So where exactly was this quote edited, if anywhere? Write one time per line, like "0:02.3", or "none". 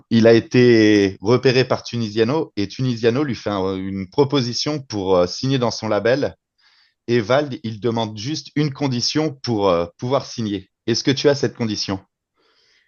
none